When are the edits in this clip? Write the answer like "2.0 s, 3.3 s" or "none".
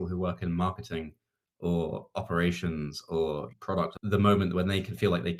3.5 s